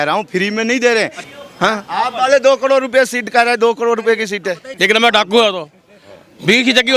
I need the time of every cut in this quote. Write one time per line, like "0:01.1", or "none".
0:01.2
0:04.7

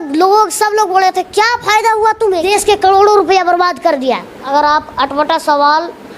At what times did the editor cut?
0:02.5
0:04.4

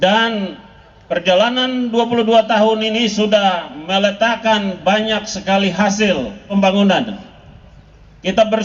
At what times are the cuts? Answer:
0:06.5

